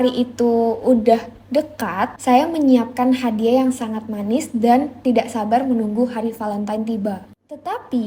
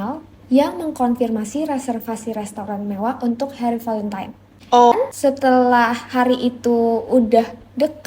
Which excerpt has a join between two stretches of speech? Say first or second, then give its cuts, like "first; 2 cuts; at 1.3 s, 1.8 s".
second; 1 cut; at 4.9 s